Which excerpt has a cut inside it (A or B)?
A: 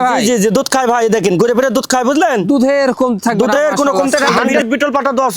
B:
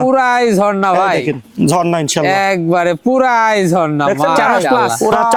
A